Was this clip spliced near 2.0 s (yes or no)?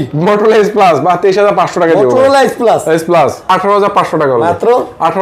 no